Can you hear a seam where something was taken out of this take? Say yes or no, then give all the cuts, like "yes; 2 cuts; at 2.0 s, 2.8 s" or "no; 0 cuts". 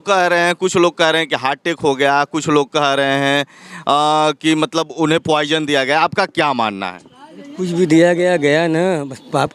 no; 0 cuts